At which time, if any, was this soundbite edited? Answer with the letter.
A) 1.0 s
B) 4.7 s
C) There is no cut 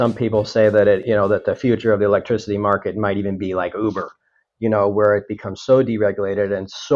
A